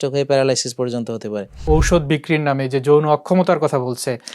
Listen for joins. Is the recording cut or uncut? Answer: cut